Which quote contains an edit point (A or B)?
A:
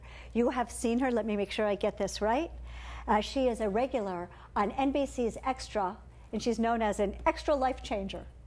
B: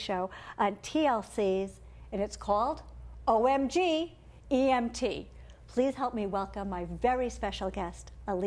B